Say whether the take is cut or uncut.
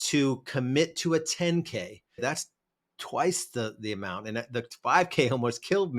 cut